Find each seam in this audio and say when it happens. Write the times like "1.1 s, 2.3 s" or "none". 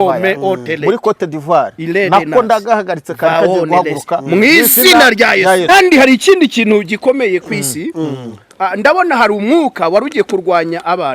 5.7 s